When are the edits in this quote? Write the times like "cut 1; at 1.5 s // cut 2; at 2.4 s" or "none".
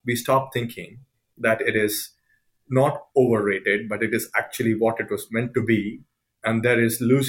none